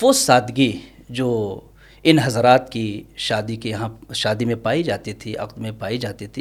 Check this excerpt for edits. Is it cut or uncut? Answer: uncut